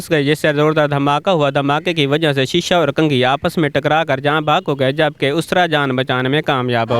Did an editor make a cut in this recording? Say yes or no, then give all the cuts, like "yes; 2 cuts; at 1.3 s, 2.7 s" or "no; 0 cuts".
no; 0 cuts